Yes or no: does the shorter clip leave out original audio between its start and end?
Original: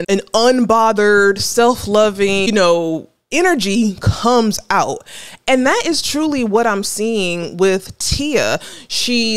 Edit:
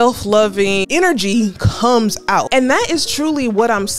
yes